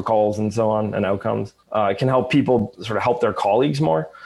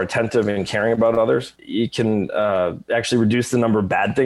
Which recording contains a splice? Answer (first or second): first